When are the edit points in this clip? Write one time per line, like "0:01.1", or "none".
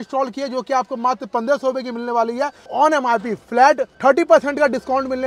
0:02.7
0:03.9